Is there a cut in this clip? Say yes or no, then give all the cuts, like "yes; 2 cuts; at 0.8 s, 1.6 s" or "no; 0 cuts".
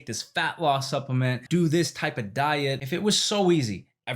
yes; 2 cuts; at 1.4 s, 2.8 s